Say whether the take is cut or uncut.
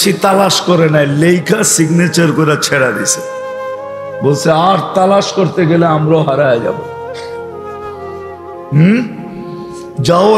cut